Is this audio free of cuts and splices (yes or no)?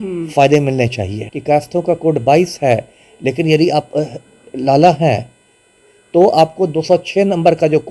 no